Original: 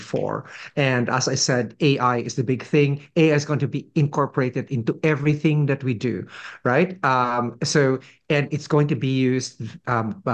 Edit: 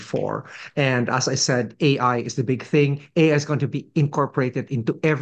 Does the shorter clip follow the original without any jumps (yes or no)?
yes